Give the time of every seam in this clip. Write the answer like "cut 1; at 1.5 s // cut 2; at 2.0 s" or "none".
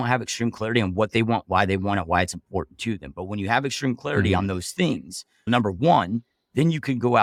none